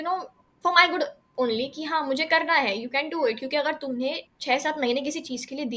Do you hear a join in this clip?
yes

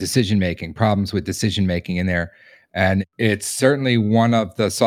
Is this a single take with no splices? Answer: no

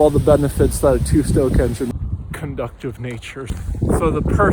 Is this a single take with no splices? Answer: no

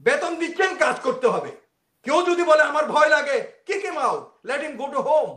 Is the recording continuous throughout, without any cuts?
yes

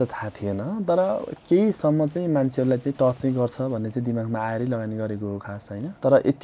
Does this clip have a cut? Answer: no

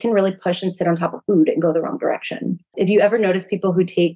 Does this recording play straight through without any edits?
no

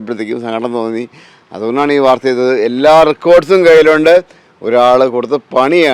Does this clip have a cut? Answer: no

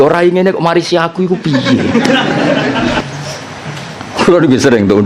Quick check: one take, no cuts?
no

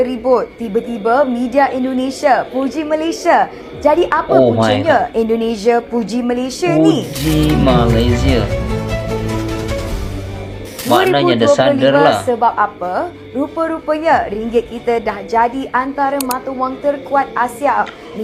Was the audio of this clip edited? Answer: no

